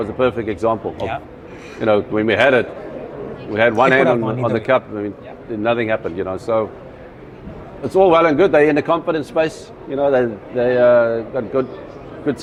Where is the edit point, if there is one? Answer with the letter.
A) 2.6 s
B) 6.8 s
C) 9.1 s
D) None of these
D